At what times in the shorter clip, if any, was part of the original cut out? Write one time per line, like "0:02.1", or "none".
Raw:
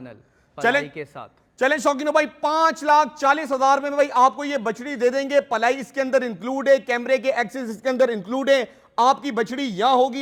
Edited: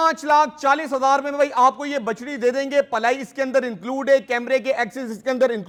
none